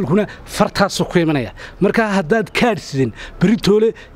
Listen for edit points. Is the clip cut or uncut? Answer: uncut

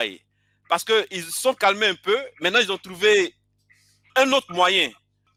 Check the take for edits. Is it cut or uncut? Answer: uncut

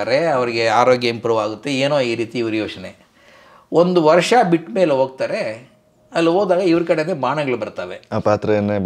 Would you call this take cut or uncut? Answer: uncut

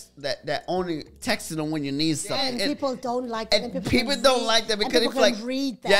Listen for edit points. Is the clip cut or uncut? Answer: uncut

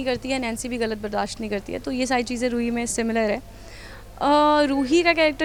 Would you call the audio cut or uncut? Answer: uncut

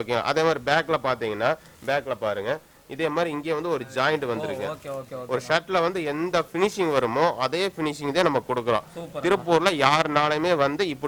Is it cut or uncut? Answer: uncut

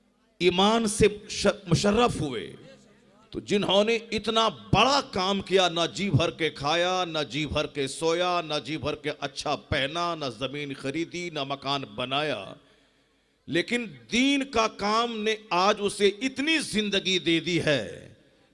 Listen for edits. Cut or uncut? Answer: uncut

